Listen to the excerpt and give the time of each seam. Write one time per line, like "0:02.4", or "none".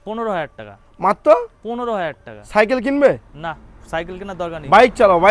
none